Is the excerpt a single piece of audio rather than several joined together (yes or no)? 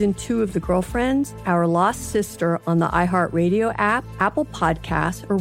no